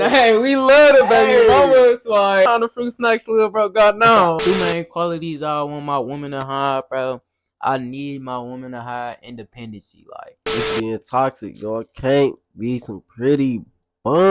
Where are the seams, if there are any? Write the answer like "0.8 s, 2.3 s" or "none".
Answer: 2.5 s, 4.4 s, 10.4 s